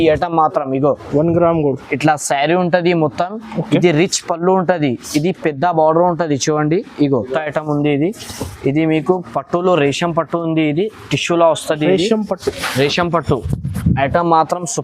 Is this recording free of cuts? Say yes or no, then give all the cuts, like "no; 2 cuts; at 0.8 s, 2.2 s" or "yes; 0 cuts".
no; 1 cut; at 7.3 s